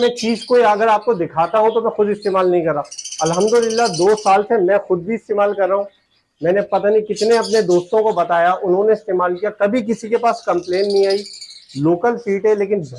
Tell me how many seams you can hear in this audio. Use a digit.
0